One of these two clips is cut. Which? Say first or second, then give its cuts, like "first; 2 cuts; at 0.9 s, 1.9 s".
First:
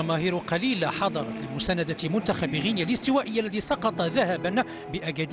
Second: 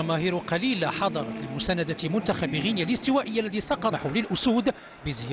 first; 1 cut; at 3.9 s